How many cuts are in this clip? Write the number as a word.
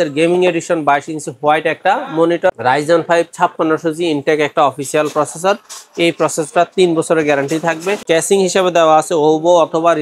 two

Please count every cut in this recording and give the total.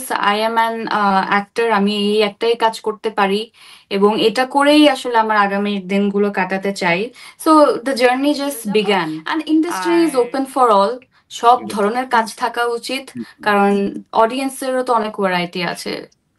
one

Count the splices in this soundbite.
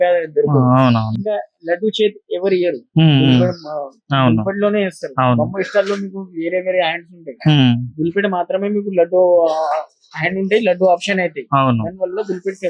zero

